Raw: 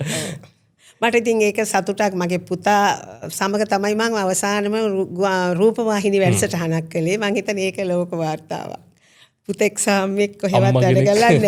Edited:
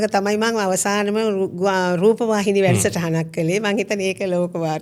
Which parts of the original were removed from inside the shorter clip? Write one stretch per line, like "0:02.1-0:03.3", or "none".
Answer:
none